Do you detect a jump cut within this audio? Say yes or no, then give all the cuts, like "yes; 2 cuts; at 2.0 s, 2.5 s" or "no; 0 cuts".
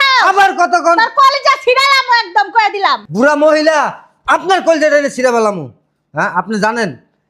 yes; 1 cut; at 3.1 s